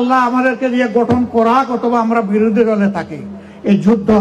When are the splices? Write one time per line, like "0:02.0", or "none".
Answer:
none